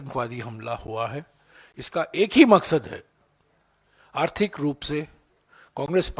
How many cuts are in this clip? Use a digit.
0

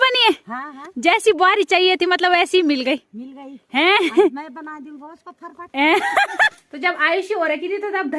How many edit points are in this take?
1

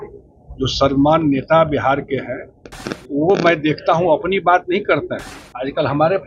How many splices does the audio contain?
0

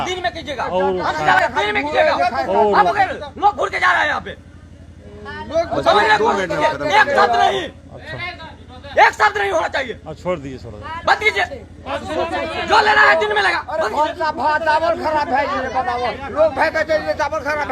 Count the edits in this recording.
1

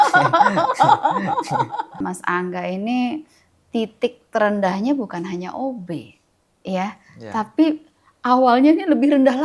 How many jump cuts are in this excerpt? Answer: 1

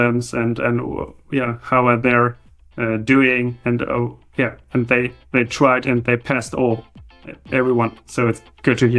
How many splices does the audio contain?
1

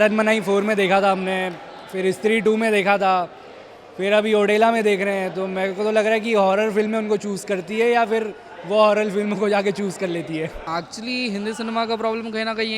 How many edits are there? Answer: 1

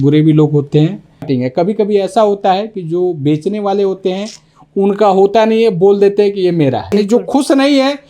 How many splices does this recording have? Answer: 2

